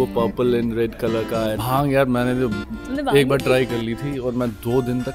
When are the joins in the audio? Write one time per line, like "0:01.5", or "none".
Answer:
0:01.3